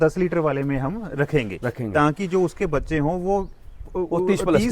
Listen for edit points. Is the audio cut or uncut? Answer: uncut